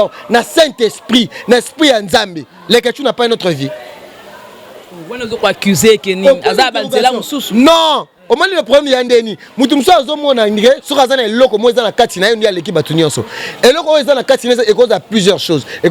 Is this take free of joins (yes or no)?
yes